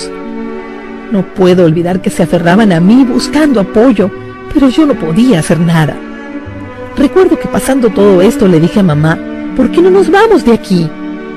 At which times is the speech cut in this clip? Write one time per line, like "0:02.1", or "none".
none